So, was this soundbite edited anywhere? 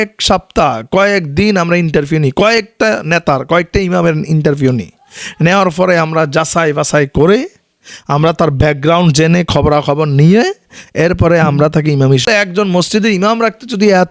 yes; 1 cut; at 12.2 s

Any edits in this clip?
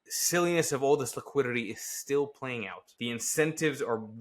yes; 1 cut; at 2.8 s

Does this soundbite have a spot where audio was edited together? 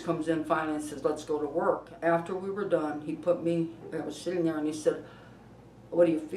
yes; 1 cut; at 1.9 s

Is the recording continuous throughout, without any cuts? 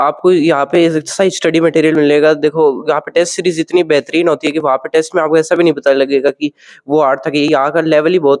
yes; 0 cuts

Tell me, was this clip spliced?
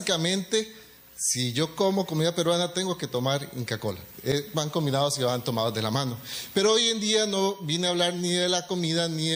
no; 0 cuts

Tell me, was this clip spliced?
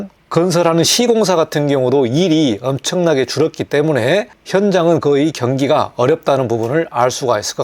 no; 0 cuts

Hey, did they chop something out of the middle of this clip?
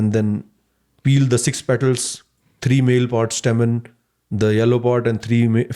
no; 0 cuts

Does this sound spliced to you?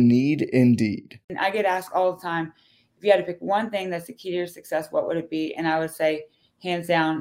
yes; 1 cut; at 1.3 s

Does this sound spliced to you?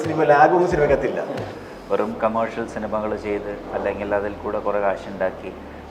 yes; 1 cut; at 1.6 s

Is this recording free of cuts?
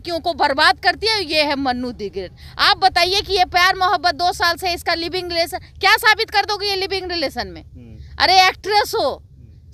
yes; 0 cuts

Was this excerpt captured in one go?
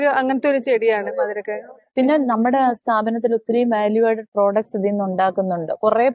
yes; 0 cuts

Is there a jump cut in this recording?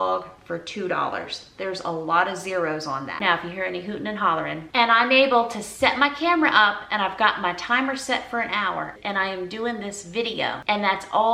no; 0 cuts

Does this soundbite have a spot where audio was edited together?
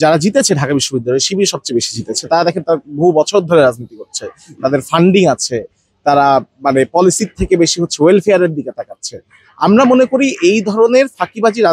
no; 0 cuts

